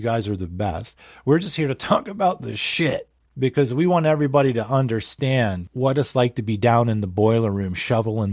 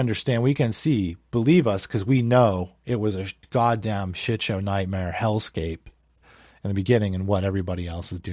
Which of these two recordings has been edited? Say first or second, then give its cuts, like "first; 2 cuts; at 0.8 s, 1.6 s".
first; 2 cuts; at 3.2 s, 5.6 s